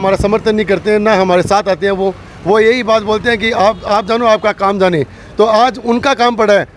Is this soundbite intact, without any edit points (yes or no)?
yes